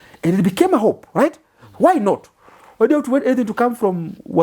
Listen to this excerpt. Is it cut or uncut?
uncut